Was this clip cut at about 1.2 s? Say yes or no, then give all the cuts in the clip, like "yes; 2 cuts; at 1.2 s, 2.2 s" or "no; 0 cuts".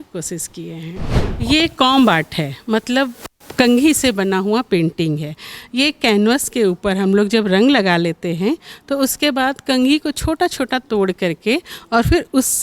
yes; 1 cut; at 1.2 s